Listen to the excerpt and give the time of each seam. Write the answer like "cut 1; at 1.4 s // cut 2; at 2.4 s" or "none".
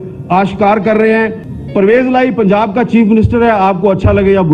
cut 1; at 1.5 s